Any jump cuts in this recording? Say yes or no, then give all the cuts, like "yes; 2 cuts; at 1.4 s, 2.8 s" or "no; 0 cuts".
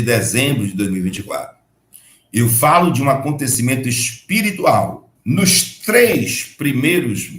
yes; 1 cut; at 5.1 s